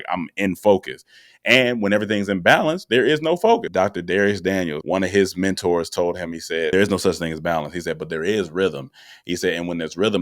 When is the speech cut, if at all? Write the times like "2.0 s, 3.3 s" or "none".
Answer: 3.7 s, 4.8 s, 6.7 s